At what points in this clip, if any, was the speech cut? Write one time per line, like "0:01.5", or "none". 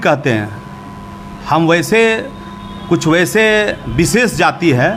none